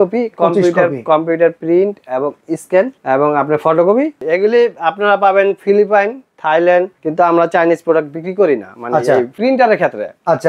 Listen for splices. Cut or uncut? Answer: cut